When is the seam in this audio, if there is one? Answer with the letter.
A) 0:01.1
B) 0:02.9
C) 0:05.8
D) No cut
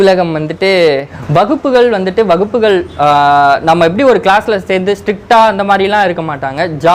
A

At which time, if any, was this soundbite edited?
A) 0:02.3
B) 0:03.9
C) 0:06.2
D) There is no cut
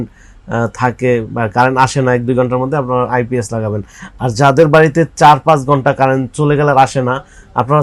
D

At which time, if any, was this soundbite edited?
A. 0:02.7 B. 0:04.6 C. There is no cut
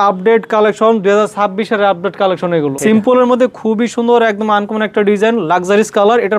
A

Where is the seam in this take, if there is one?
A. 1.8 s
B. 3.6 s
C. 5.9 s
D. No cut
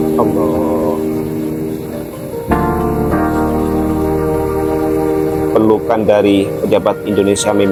D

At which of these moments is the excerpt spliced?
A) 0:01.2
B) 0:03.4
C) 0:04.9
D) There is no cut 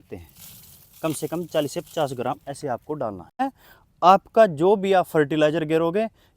B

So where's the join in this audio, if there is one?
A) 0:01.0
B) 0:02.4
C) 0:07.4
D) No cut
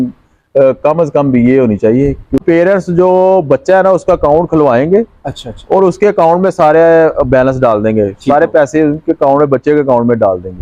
B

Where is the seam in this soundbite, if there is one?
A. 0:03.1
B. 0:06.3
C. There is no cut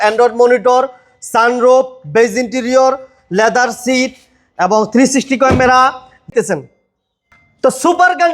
B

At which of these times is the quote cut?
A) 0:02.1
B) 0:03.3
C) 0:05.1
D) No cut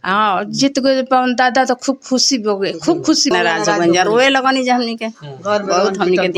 B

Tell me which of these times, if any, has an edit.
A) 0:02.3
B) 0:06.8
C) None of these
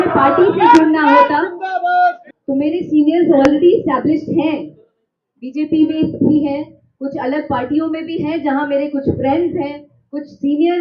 A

